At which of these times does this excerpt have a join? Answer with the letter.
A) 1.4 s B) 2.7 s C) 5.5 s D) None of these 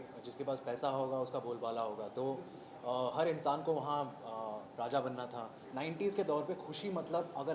C